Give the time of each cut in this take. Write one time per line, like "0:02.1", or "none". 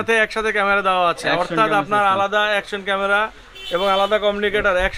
none